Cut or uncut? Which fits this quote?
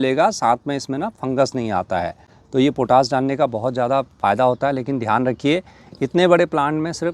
uncut